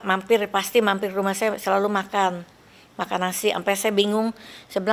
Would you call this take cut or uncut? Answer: uncut